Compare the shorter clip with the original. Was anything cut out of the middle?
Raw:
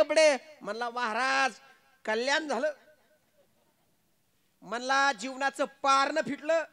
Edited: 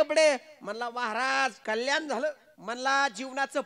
yes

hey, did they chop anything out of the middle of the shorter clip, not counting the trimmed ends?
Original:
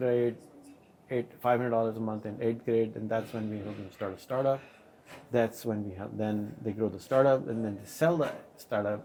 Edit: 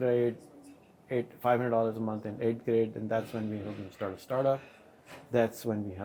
no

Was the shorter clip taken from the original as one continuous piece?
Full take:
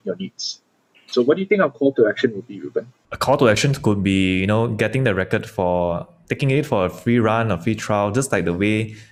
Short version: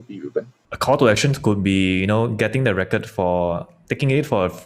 yes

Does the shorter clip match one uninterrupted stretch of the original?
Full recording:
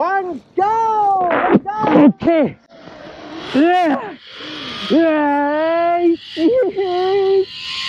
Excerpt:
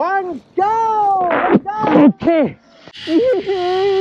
no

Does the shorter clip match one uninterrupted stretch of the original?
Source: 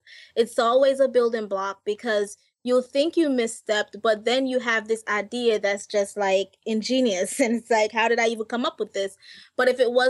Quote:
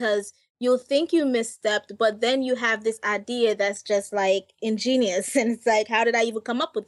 yes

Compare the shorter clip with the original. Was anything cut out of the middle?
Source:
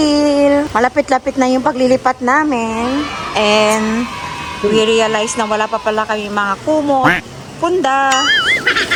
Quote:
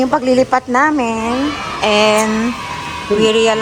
no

